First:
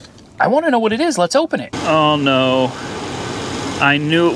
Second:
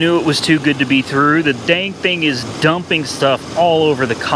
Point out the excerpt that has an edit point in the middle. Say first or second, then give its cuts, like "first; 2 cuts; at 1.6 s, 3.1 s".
first; 1 cut; at 1.7 s